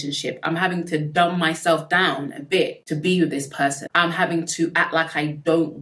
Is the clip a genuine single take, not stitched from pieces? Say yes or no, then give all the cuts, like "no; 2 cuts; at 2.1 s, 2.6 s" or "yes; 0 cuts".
yes; 0 cuts